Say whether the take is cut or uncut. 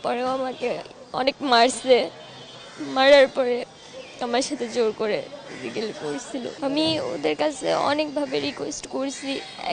cut